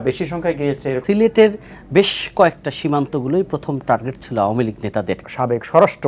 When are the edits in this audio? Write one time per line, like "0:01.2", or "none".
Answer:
0:01.0
0:05.3